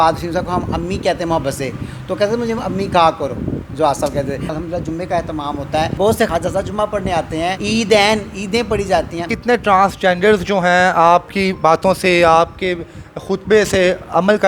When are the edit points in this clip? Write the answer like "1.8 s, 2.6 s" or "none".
4.5 s, 6.1 s, 7.6 s, 9.3 s